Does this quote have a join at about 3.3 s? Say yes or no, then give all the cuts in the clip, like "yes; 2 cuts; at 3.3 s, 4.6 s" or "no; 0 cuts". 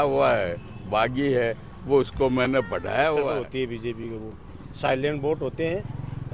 yes; 1 cut; at 3.3 s